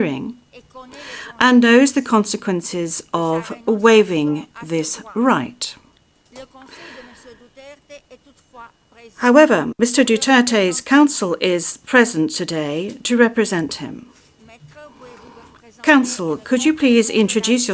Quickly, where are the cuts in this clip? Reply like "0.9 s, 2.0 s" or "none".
none